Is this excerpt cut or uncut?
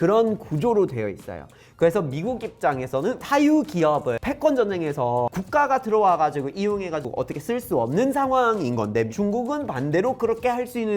cut